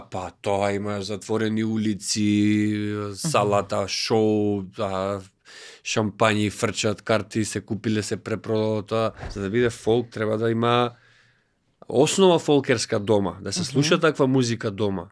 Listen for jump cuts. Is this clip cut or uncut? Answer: cut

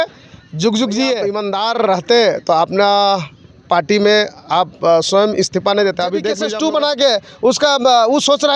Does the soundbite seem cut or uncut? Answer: cut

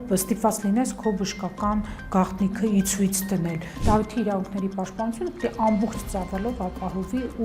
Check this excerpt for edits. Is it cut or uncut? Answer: cut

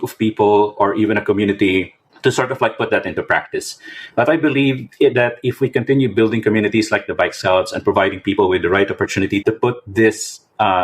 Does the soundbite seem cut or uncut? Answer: cut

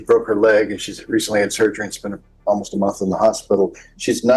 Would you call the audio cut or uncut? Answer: uncut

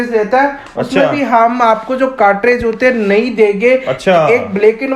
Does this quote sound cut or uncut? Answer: uncut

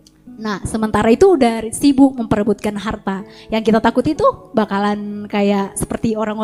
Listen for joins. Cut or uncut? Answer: uncut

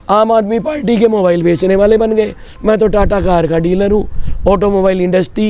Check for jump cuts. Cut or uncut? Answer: uncut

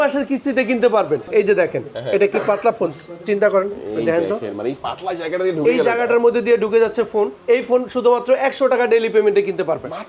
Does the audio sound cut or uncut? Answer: cut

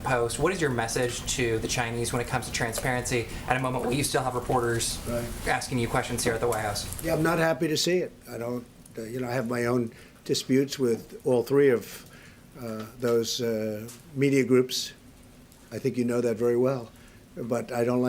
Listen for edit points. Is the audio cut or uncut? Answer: uncut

